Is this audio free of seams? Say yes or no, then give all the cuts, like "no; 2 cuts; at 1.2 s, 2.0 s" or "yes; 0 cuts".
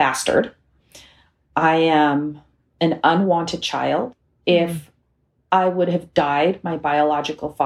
no; 1 cut; at 4.2 s